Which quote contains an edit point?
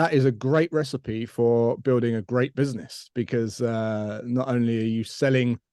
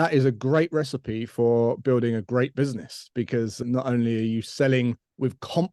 second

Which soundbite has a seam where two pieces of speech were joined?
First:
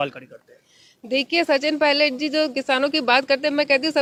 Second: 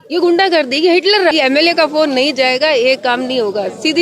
second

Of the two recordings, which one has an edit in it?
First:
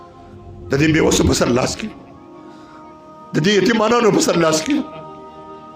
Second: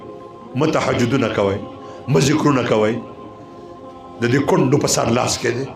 first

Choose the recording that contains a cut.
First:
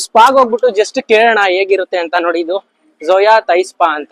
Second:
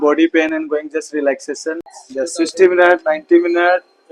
second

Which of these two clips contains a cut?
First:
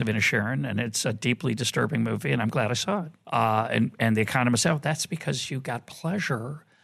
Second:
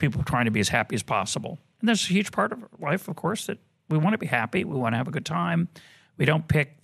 first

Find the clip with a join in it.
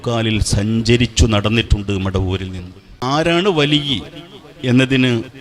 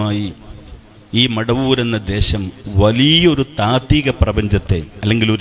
first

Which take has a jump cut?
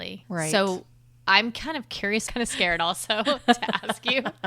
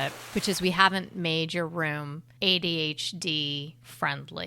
first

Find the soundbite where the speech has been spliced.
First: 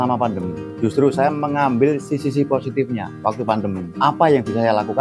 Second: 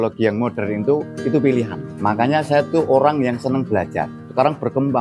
second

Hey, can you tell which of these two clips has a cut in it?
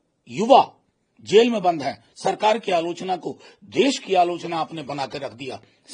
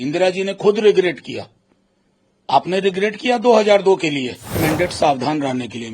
second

